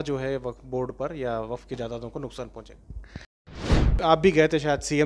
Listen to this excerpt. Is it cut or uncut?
cut